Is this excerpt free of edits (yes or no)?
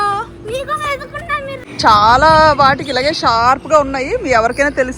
no